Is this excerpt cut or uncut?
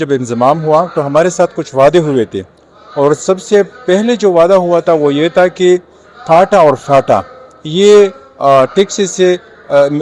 uncut